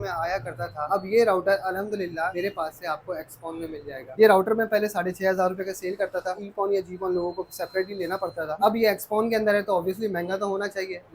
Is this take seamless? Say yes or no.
no